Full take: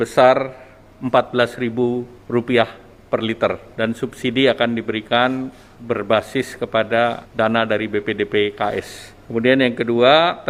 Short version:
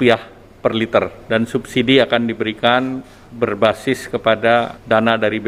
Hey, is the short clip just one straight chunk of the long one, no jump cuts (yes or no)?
yes